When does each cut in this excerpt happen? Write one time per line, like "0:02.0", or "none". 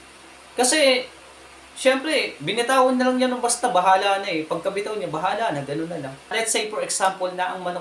0:06.3